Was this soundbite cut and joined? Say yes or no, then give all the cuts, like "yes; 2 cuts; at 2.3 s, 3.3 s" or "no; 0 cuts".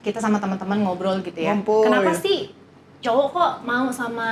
no; 0 cuts